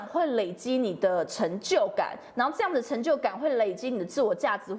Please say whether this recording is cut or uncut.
uncut